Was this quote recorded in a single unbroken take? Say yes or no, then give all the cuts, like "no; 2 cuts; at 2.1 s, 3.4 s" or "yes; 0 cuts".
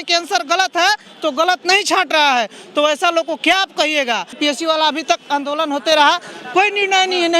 no; 1 cut; at 4.3 s